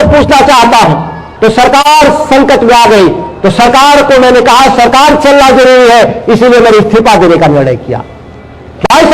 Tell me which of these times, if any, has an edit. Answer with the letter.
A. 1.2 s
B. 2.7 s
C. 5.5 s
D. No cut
A